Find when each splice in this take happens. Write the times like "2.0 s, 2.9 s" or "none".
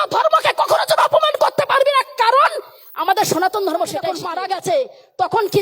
4.2 s